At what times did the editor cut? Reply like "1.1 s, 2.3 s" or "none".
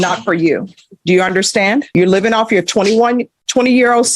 1.9 s